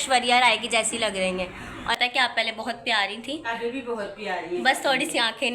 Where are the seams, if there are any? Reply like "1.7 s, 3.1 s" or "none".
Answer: 1.9 s